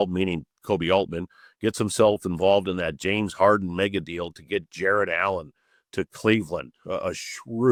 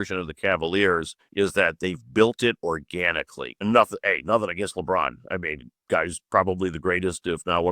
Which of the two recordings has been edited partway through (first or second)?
second